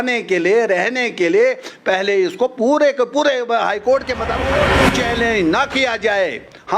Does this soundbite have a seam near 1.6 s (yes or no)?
no